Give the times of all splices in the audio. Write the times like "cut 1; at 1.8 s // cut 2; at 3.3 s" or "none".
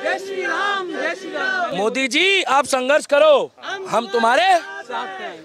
none